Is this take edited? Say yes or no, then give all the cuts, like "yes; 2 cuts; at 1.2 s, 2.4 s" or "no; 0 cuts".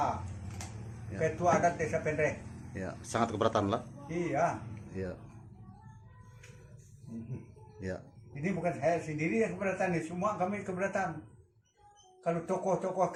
no; 0 cuts